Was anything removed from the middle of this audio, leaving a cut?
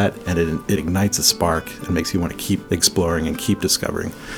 yes; 2 cuts; at 0.7 s, 2.6 s

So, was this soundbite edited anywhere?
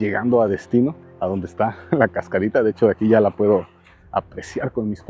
yes; 1 cut; at 1.1 s

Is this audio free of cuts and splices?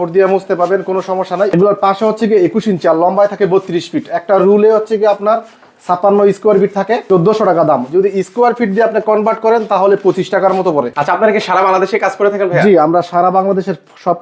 no; 3 cuts; at 1.5 s, 7.0 s, 10.9 s

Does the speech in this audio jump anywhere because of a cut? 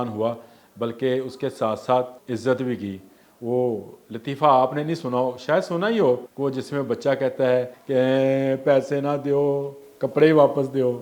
yes; 3 cuts; at 2.2 s, 6.3 s, 7.8 s

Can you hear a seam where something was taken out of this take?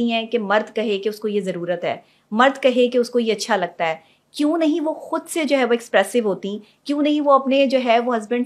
no; 0 cuts

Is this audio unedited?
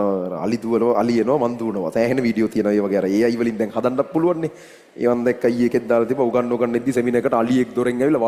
yes; 0 cuts

